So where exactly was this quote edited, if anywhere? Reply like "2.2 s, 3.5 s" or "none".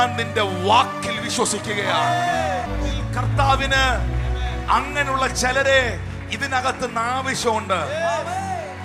2.7 s